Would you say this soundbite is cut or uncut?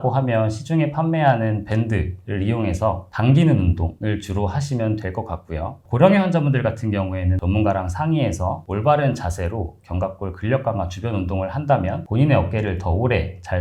cut